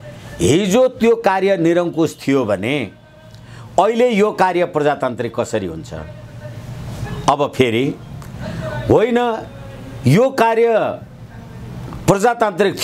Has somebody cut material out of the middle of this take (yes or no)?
no